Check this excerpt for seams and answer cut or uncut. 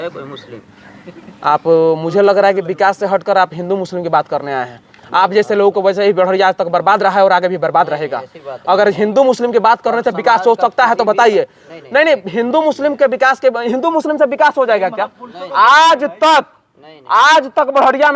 uncut